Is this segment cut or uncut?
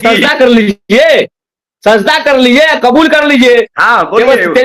uncut